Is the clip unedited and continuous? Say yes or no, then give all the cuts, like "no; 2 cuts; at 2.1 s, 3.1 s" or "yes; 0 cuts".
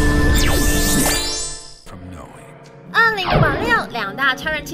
no; 1 cut; at 2.0 s